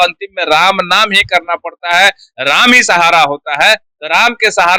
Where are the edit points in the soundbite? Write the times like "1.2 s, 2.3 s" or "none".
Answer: none